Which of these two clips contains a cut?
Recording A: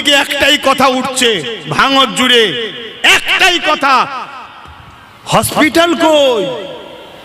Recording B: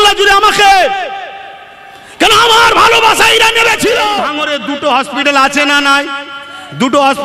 B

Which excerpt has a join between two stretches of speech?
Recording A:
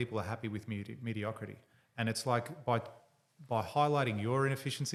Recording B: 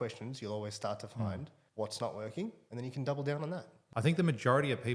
B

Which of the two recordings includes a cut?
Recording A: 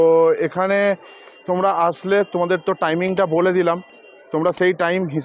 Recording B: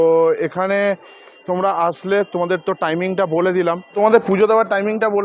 B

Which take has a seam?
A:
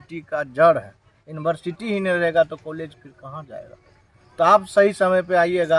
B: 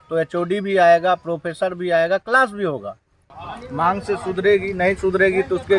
B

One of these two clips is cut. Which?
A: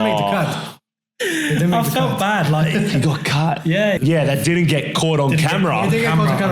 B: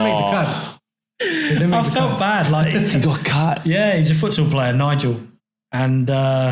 A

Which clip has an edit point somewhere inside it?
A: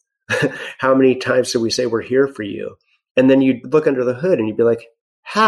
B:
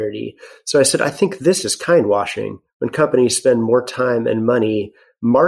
A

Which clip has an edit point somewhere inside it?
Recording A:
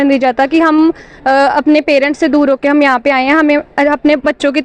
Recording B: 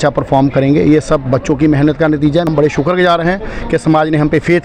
B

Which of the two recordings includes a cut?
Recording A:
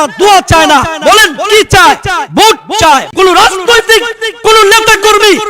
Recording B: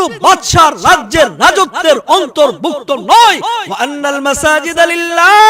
A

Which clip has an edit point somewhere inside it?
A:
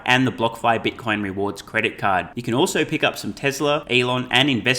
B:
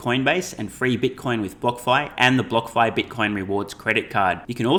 A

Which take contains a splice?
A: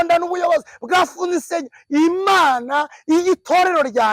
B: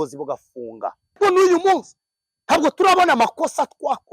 B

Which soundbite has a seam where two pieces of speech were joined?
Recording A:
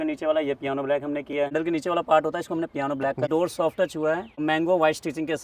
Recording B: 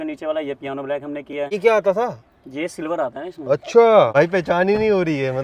A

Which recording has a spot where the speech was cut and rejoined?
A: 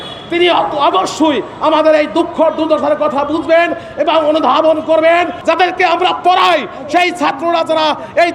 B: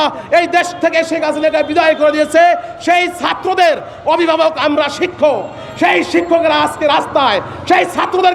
A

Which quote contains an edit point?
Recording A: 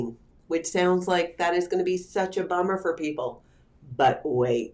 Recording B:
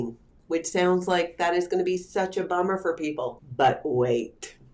B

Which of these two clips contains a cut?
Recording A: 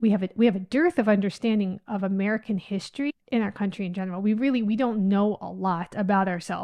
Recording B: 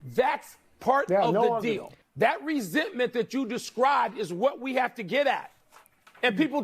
B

